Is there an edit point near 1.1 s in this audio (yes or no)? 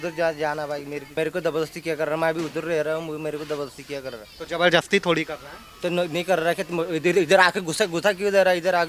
yes